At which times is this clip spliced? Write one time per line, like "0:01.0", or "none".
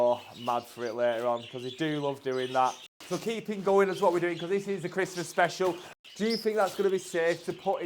0:02.9
0:05.9